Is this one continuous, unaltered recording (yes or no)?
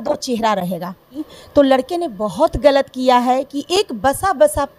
no